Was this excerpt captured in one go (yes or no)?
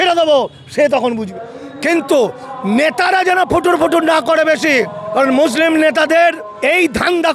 no